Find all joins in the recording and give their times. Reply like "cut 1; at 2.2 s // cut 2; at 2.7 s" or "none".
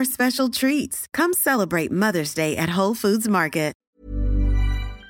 cut 1; at 3.8 s